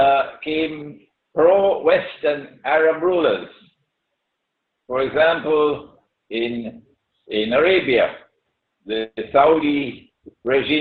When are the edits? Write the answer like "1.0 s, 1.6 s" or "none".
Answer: none